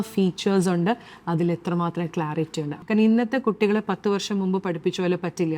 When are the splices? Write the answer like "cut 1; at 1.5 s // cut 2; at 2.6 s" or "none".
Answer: cut 1; at 2.7 s